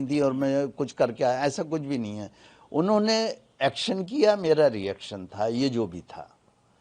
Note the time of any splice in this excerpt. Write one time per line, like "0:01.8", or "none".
none